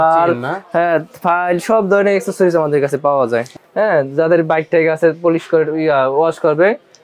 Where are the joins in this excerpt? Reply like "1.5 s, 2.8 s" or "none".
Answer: 3.6 s

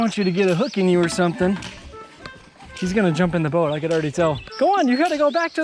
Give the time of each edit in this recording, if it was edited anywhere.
4.4 s

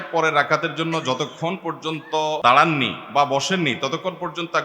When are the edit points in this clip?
2.4 s

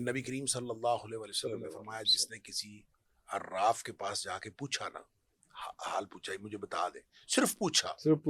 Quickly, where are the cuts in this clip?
none

